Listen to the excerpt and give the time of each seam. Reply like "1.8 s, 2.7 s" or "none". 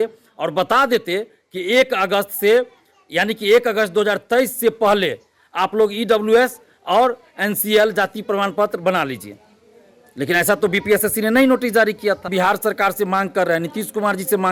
12.3 s